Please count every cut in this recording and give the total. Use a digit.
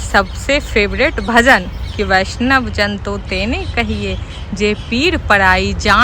0